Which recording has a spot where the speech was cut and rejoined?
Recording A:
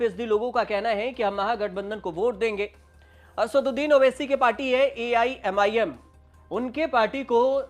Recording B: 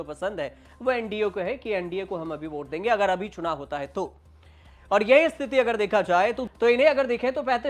B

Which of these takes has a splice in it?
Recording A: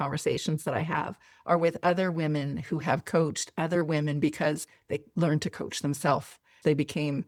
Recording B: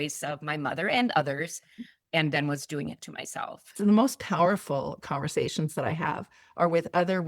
B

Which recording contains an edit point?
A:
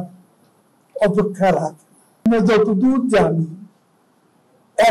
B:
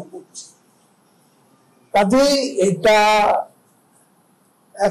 A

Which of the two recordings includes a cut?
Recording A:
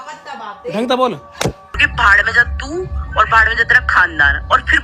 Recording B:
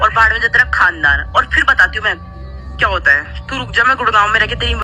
A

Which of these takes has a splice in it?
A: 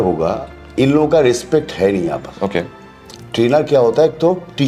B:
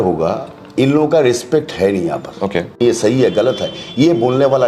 B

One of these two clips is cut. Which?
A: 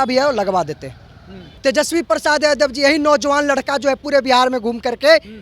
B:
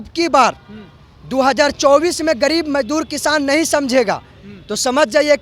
A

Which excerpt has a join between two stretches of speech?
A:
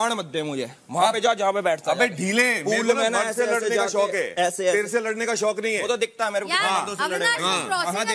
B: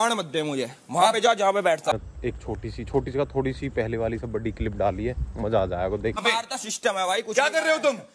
B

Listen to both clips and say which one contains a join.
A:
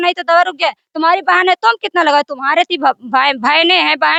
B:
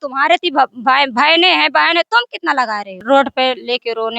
B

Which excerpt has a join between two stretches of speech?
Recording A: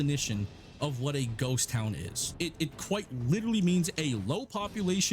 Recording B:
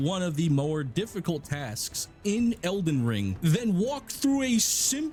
A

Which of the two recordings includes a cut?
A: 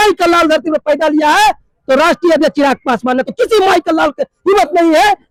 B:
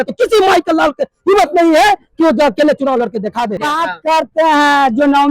B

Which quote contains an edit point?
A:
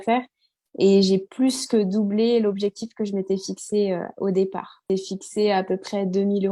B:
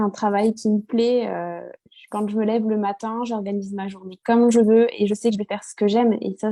A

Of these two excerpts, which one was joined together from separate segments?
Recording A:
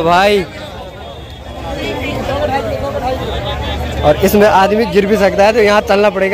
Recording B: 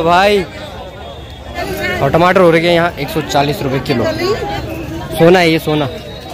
B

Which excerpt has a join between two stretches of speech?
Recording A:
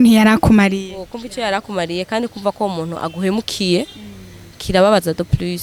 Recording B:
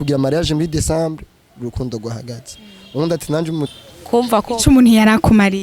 B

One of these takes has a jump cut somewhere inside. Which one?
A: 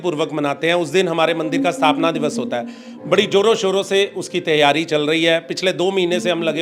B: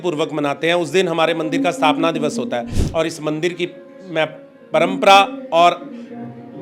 B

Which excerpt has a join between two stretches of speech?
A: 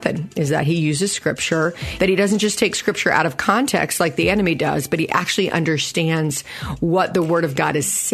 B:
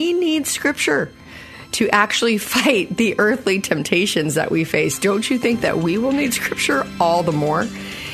A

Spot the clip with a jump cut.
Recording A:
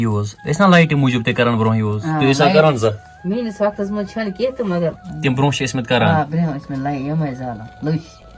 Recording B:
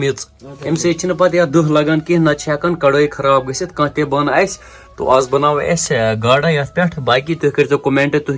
A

